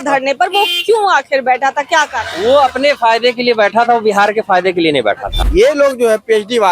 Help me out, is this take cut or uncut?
cut